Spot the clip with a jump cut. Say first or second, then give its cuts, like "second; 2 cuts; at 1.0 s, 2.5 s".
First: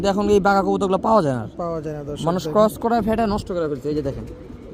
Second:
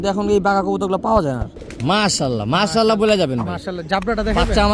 second; 1 cut; at 1.6 s